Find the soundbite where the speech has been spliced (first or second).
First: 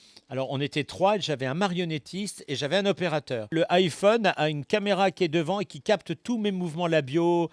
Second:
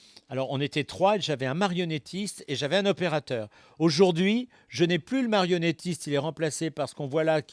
first